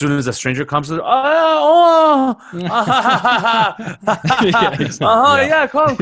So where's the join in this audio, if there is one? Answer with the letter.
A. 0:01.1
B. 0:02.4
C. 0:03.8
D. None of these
D